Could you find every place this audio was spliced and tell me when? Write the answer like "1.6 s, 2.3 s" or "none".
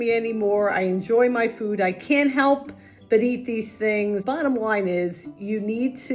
4.2 s

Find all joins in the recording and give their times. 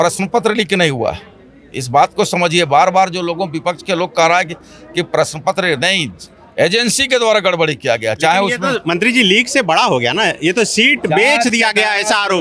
none

